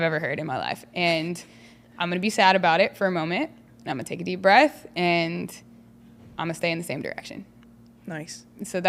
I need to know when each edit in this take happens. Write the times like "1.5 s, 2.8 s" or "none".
none